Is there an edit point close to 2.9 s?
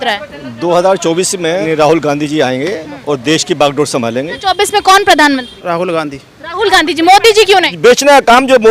no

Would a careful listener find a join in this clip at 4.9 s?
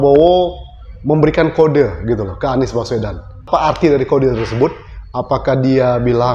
no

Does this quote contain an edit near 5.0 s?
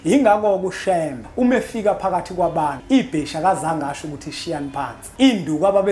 yes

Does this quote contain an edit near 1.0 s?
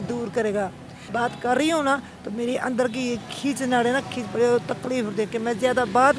yes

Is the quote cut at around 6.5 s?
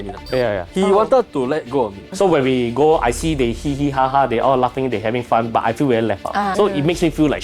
yes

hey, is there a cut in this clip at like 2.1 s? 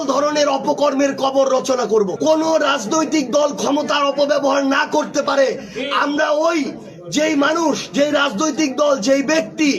yes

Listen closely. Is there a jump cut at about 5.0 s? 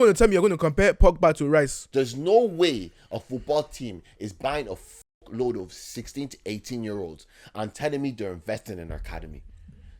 no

